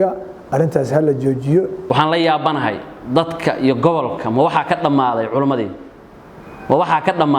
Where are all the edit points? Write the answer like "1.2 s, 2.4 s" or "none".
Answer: 1.8 s